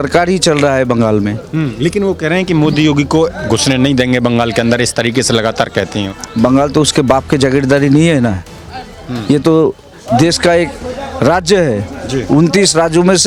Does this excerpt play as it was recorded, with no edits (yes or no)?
yes